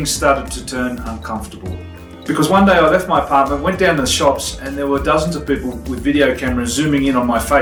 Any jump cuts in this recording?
no; 0 cuts

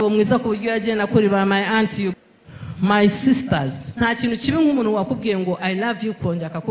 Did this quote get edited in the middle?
yes; 1 cut; at 2.1 s

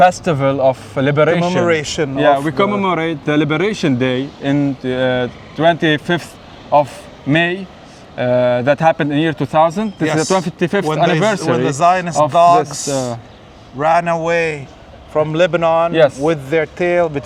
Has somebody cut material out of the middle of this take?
no; 0 cuts

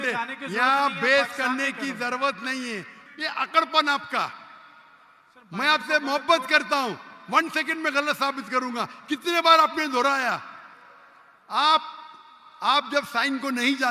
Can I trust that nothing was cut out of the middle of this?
no; 1 cut; at 3.0 s

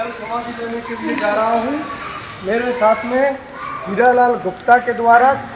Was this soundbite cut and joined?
no; 0 cuts

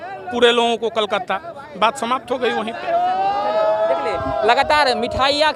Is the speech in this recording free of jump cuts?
yes; 0 cuts

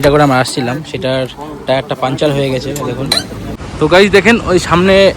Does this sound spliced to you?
yes; 1 cut; at 3.6 s

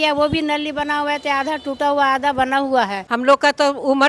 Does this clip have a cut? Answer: yes; 1 cut; at 3.0 s

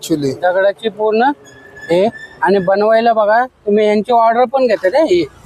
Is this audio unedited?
yes; 0 cuts

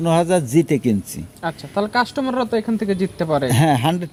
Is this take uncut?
yes; 0 cuts

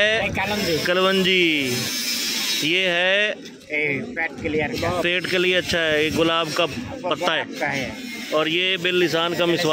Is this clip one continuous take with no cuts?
yes; 0 cuts

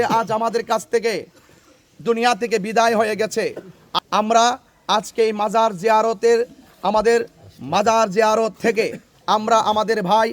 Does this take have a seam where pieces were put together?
yes; 1 cut; at 3.8 s

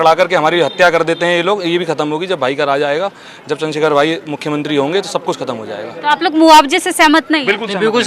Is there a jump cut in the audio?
no; 0 cuts

